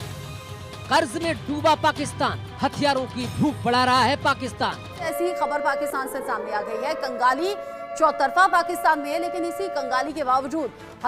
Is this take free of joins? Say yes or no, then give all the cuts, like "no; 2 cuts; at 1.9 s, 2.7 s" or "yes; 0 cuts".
no; 1 cut; at 5.2 s